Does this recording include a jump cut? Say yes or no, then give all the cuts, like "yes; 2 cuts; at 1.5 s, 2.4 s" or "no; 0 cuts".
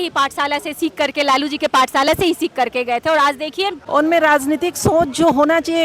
yes; 1 cut; at 3.8 s